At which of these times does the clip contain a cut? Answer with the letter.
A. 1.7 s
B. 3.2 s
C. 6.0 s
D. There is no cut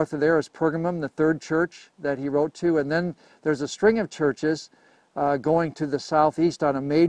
D